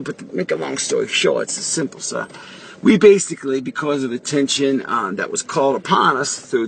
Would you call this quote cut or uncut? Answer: cut